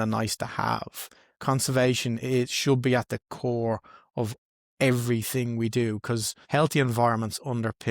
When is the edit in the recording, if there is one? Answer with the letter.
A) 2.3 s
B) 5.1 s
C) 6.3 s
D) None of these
C